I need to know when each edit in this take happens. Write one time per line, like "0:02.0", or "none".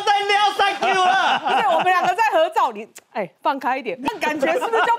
0:04.1